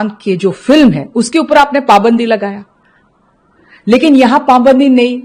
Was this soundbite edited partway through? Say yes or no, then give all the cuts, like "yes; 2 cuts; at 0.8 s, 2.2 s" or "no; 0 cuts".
no; 0 cuts